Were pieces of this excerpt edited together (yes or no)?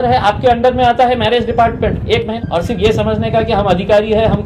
yes